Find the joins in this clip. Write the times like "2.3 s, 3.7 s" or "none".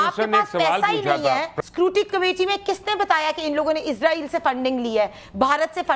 1.5 s